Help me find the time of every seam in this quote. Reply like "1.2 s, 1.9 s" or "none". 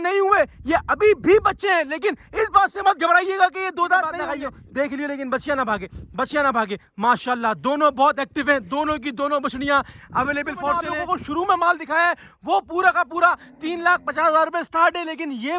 4.3 s, 10.9 s